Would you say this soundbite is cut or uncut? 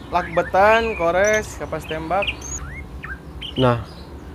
cut